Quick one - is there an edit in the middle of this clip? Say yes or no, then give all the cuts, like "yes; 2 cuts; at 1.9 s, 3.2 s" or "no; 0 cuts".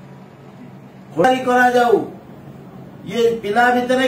yes; 1 cut; at 1.2 s